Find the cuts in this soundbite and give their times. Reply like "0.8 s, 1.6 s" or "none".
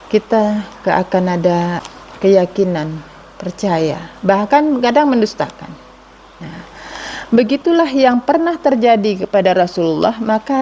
1.8 s